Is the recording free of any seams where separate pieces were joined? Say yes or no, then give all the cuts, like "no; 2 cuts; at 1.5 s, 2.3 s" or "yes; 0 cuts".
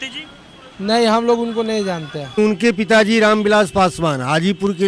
no; 1 cut; at 2.4 s